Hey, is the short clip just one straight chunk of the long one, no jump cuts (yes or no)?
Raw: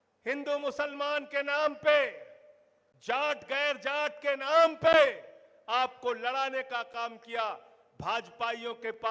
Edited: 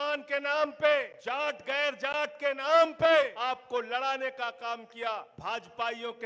no